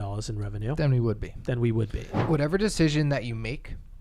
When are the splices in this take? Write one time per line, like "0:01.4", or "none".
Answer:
0:02.1